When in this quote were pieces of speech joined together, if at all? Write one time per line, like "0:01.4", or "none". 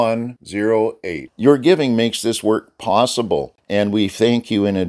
0:03.6